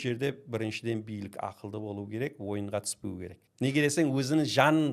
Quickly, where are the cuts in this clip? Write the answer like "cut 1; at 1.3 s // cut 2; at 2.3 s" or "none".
cut 1; at 3.4 s